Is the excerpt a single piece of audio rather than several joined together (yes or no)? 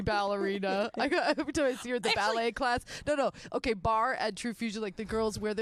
yes